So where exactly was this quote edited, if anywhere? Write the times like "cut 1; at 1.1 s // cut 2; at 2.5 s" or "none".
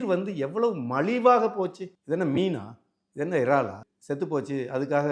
cut 1; at 1.9 s // cut 2; at 3.8 s